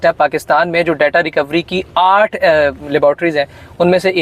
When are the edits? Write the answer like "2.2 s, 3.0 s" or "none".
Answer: none